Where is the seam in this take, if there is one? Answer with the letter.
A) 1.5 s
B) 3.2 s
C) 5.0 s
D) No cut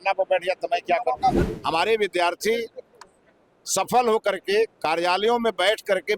A